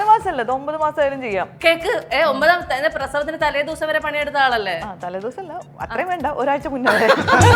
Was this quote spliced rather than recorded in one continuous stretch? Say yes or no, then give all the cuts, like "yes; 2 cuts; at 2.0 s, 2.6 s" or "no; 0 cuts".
no; 0 cuts